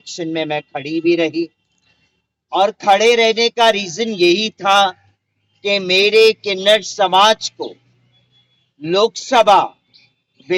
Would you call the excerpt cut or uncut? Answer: uncut